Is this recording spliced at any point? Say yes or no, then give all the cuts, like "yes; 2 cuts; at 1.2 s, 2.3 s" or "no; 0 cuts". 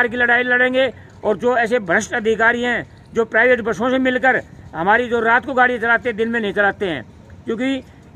no; 0 cuts